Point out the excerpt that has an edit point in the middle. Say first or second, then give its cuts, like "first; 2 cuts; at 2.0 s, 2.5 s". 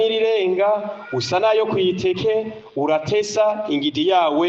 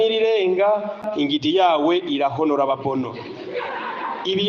second; 1 cut; at 1.1 s